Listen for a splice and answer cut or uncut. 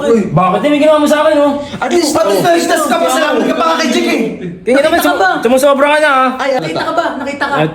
uncut